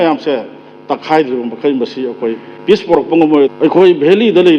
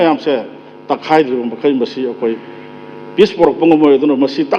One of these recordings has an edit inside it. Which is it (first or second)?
first